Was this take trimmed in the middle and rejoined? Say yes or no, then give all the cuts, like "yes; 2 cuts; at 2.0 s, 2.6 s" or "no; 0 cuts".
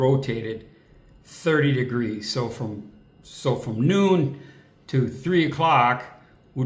no; 0 cuts